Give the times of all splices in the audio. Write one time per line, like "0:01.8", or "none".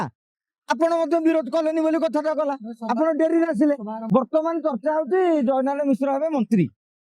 0:03.9

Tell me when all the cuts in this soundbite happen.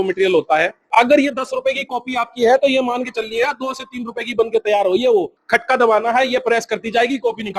0:00.8
0:05.4

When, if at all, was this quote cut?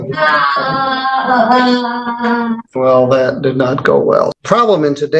0:02.7
0:04.4

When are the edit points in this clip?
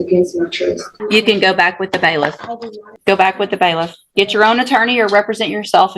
0:00.9
0:02.9

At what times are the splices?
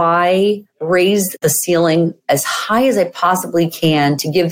0:01.3

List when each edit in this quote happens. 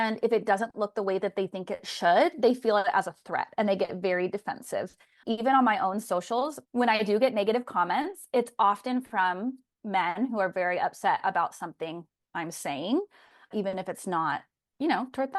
0:06.6
0:13.5

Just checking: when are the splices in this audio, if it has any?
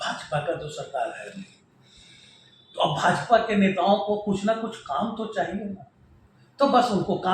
none

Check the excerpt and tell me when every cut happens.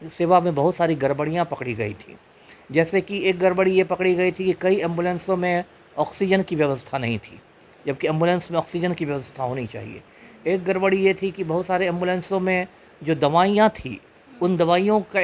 none

